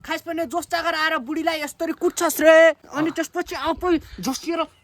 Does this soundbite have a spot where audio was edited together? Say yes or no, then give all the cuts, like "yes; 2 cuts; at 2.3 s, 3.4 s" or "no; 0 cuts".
yes; 1 cut; at 2.9 s